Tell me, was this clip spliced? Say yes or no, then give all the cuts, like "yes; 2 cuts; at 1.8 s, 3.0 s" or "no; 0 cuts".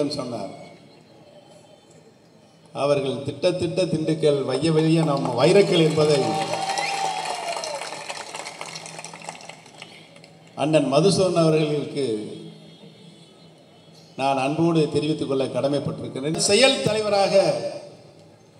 yes; 1 cut; at 16.3 s